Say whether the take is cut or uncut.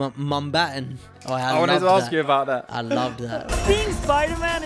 uncut